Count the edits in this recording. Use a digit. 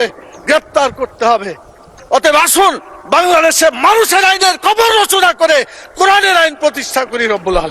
1